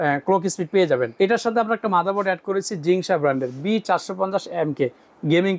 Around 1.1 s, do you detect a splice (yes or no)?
yes